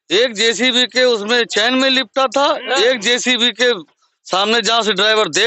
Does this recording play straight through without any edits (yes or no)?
yes